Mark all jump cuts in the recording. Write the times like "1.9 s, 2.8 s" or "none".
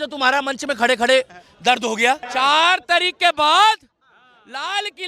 2.2 s